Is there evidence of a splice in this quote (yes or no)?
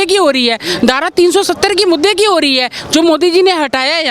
no